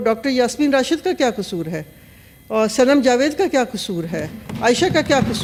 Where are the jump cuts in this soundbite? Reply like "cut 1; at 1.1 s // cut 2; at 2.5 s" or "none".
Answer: none